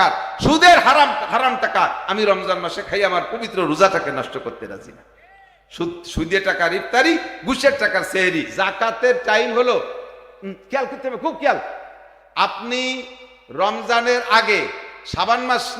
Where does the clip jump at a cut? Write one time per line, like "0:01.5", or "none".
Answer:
0:08.5